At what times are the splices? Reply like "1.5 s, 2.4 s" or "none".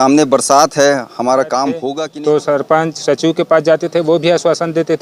1.9 s